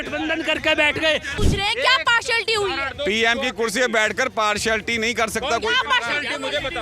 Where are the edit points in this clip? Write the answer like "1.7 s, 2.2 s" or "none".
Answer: 1.3 s